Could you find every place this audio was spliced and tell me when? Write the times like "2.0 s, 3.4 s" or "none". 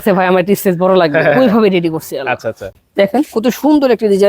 2.8 s